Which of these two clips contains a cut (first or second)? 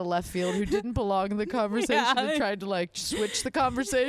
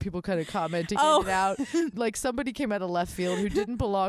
second